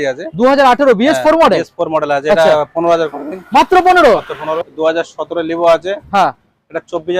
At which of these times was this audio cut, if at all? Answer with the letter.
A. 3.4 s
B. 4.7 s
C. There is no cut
B